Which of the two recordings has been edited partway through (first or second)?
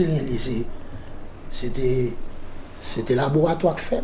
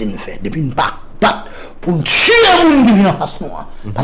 second